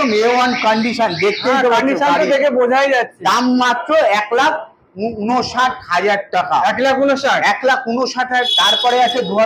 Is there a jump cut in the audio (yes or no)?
yes